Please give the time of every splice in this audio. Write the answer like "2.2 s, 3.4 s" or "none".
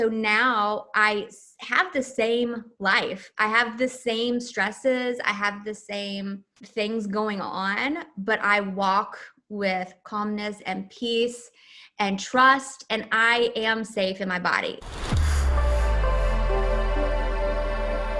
6.5 s, 14.8 s